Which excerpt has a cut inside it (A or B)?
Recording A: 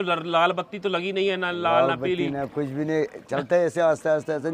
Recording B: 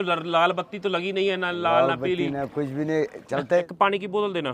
B